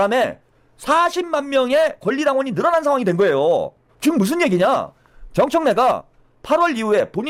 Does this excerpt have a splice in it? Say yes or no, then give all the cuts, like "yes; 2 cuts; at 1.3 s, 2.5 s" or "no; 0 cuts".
no; 0 cuts